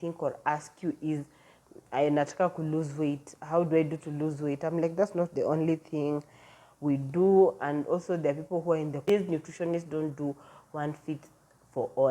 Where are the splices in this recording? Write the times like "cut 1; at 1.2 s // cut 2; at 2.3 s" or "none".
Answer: cut 1; at 9.0 s